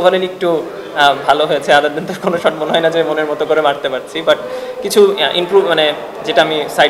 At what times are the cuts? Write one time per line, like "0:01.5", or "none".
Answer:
none